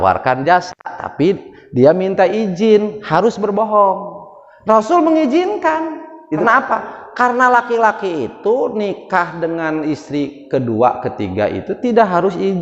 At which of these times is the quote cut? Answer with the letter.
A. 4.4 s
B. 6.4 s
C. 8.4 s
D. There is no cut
B